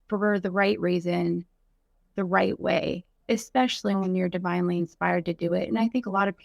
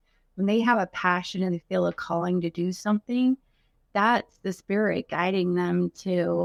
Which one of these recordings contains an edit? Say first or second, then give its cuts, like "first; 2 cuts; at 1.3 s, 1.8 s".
first; 1 cut; at 3.2 s